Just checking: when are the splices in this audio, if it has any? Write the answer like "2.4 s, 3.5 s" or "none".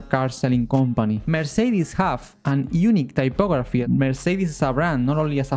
1.2 s, 2.3 s, 3.8 s